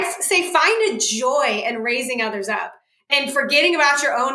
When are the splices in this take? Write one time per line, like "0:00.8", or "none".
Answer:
0:03.1